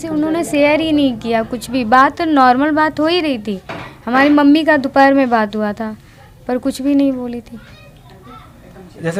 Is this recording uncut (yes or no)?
yes